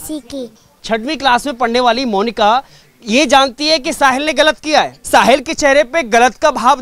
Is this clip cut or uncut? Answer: cut